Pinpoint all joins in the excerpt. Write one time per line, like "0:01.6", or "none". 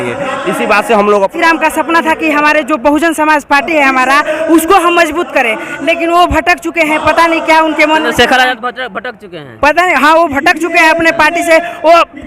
0:01.3